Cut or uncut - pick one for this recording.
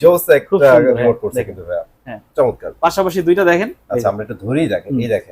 uncut